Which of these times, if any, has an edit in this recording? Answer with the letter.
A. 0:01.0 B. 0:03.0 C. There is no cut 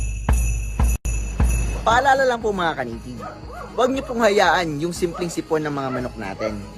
A